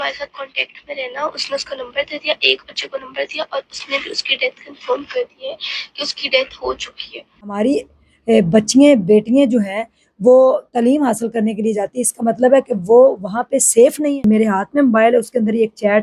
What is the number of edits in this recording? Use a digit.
2